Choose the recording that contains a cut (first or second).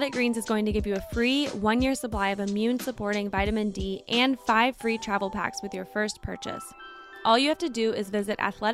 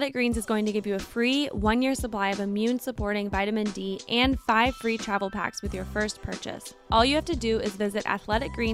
second